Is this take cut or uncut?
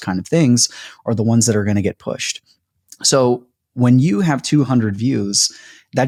uncut